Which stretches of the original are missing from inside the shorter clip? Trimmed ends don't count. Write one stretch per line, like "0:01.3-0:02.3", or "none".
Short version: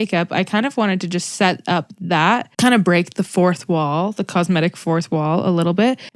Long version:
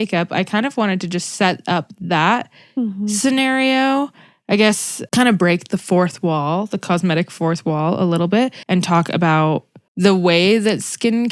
0:02.5-0:05.0